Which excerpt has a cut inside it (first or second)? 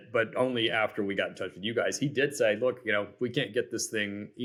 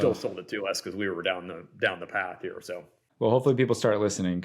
second